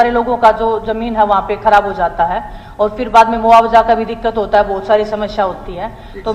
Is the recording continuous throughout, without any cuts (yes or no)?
yes